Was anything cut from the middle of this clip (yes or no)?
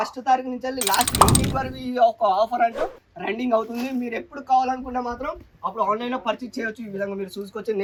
no